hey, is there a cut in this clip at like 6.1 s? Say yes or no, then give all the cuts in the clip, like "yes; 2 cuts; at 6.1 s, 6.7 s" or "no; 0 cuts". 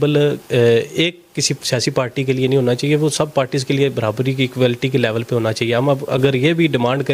no; 0 cuts